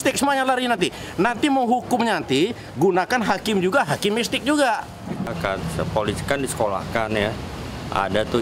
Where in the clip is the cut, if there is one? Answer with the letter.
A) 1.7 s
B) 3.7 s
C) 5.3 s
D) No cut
C